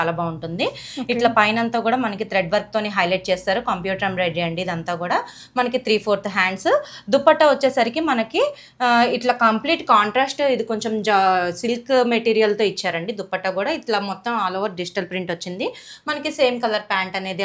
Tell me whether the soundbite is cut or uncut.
uncut